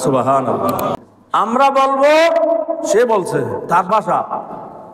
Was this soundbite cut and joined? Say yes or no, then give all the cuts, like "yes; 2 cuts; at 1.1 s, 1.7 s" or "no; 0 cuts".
yes; 1 cut; at 1.1 s